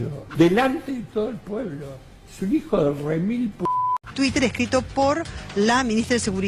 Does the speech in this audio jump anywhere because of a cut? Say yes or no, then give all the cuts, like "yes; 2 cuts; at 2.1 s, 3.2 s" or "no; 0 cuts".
yes; 1 cut; at 4.0 s